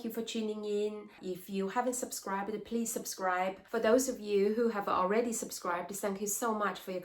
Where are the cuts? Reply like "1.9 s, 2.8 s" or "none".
1.2 s, 3.6 s